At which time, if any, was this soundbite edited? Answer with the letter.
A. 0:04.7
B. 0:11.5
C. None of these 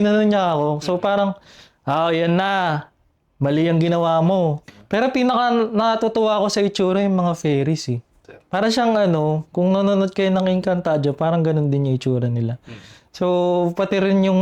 A